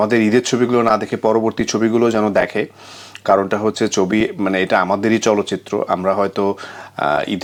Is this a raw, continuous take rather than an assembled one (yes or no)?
yes